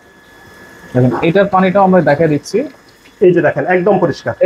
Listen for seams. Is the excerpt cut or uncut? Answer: uncut